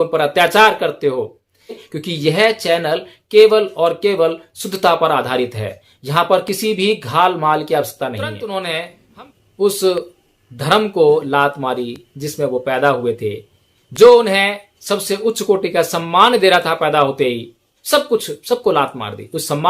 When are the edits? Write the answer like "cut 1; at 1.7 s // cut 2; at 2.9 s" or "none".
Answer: cut 1; at 1.9 s // cut 2; at 8.3 s